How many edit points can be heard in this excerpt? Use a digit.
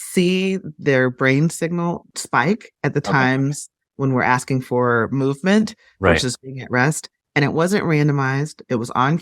1